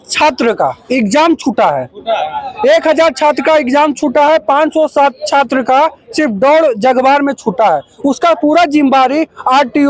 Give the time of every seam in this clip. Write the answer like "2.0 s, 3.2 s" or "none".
none